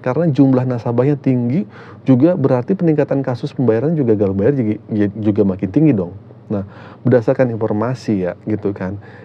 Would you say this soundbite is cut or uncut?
uncut